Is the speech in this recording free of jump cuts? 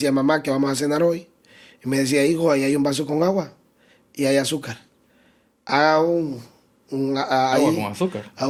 yes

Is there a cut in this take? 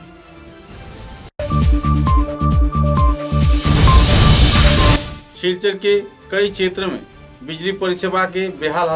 yes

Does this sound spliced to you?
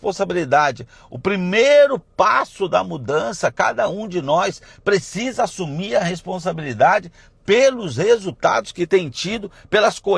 no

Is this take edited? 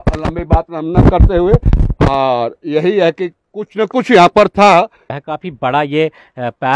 yes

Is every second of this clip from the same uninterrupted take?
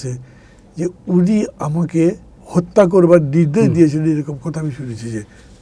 no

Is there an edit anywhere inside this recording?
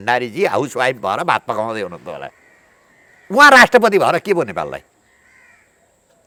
no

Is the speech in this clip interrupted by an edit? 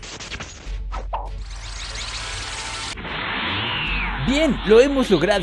yes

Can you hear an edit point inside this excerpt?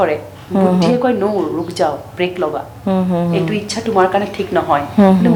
no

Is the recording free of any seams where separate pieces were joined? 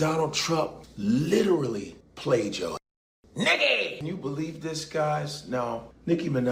yes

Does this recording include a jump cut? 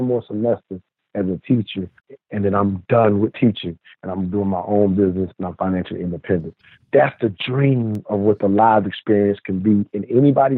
yes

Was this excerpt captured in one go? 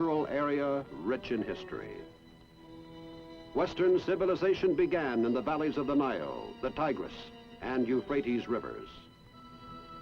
no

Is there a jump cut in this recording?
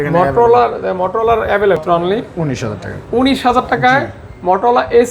yes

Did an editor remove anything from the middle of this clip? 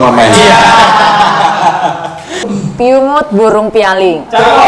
yes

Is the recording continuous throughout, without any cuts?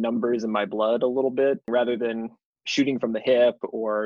no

